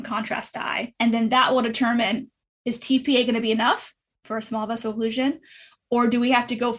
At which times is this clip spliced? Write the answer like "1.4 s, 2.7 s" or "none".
0.9 s